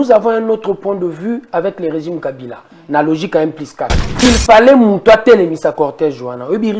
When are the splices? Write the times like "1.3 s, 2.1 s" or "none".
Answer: 4.3 s